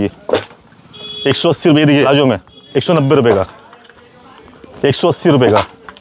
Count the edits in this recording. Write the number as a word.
one